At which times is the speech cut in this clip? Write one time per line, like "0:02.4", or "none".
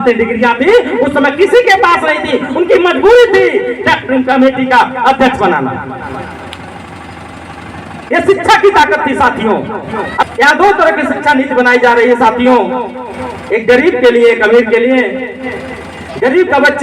0:10.2